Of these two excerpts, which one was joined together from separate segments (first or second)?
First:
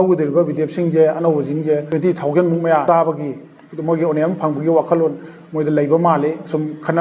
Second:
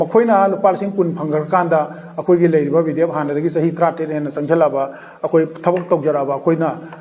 first